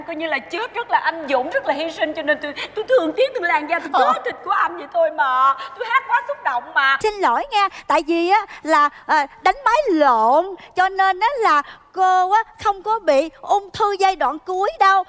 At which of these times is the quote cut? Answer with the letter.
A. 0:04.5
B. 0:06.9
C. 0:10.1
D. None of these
B